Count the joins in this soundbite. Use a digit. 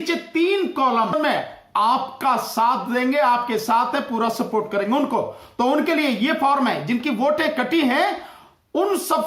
1